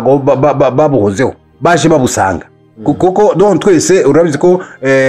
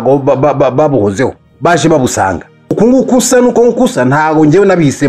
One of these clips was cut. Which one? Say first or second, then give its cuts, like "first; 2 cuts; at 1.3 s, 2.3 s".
second; 1 cut; at 2.7 s